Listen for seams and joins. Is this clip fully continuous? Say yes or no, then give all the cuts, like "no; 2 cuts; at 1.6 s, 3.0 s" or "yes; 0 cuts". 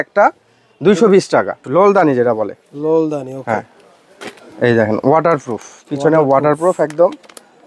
no; 1 cut; at 1.6 s